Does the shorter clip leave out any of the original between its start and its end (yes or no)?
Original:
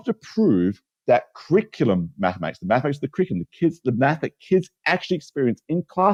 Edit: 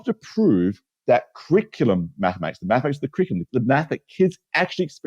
yes